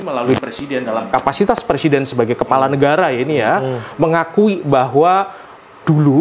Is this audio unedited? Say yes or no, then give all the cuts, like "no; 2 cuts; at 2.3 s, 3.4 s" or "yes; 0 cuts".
yes; 0 cuts